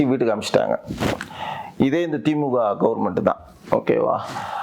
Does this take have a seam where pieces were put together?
no; 0 cuts

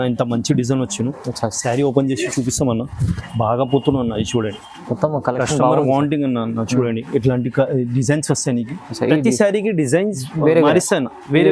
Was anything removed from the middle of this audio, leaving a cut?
no; 0 cuts

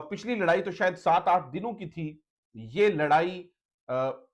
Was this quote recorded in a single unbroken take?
yes; 0 cuts

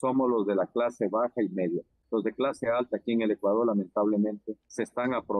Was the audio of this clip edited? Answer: no; 0 cuts

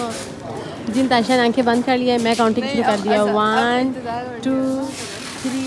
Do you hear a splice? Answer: no; 0 cuts

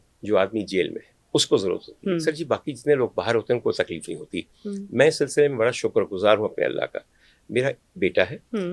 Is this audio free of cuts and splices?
yes; 0 cuts

